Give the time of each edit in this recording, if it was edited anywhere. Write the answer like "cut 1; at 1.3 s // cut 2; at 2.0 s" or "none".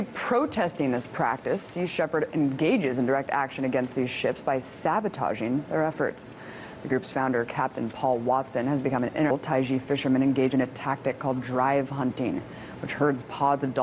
none